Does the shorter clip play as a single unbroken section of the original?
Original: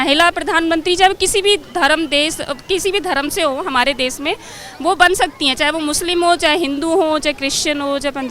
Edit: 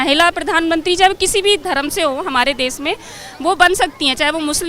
no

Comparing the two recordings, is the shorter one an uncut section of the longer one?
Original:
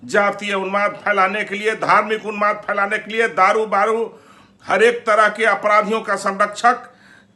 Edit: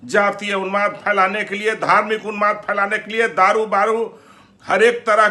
yes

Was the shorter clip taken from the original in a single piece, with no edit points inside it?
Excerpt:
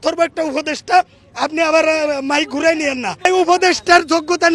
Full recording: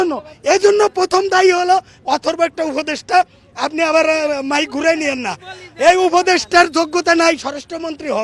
no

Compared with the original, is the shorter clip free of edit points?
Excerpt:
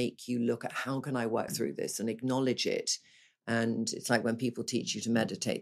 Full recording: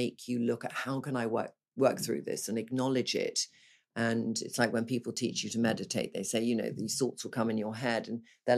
no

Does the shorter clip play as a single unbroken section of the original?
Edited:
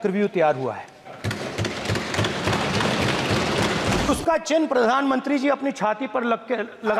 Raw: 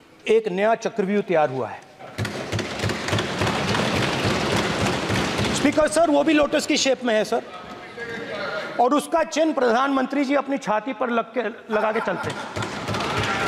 no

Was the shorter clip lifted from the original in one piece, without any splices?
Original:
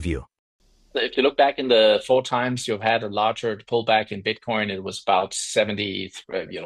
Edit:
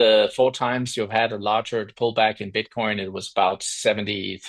yes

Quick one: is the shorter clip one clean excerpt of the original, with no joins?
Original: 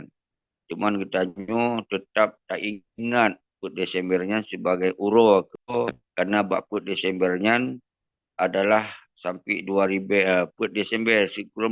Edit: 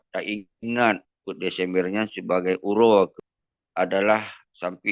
no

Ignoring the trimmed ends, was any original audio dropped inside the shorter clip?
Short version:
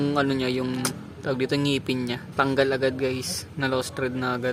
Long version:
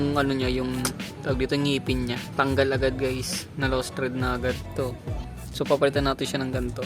no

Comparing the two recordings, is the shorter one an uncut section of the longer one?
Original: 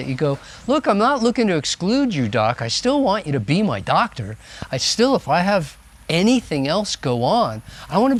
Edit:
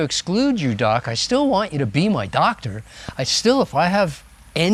yes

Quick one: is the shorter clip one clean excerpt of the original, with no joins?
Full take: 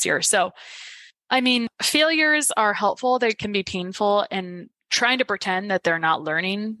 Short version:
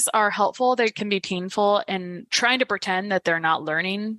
no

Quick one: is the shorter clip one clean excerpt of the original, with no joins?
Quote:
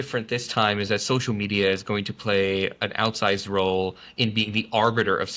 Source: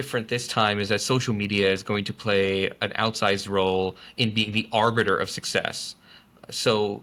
yes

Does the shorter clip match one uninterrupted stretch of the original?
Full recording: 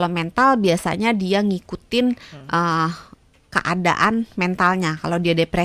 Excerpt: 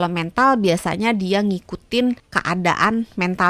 no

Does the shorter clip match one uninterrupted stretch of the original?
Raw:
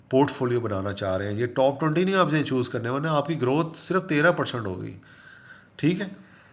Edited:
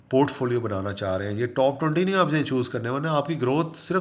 yes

